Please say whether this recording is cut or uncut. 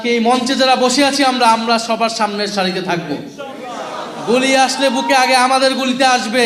uncut